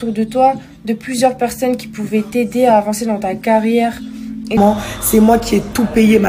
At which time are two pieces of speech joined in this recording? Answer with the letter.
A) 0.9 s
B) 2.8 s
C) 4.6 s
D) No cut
C